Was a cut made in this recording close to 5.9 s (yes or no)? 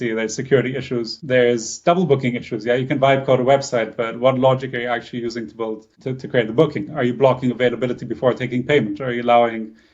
yes